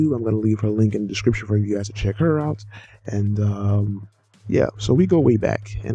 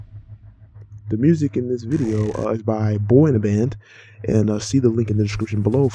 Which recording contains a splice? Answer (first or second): second